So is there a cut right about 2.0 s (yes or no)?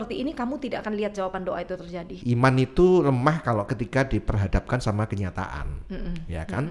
yes